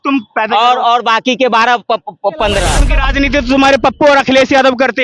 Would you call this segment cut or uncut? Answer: cut